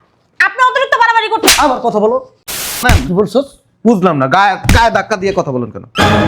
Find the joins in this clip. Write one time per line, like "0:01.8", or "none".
0:02.8